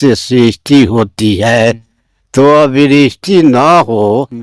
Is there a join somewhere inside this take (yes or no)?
no